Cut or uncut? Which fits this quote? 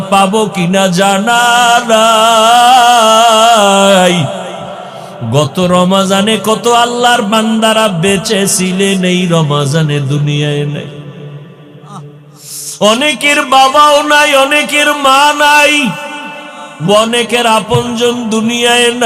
uncut